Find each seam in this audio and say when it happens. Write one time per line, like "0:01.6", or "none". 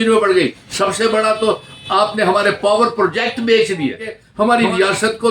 0:04.2